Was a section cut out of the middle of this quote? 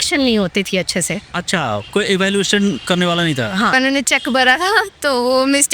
yes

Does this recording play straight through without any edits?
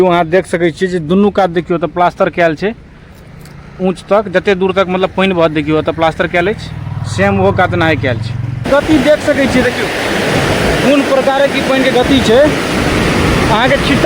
no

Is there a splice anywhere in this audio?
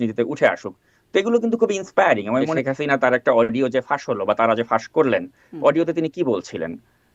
yes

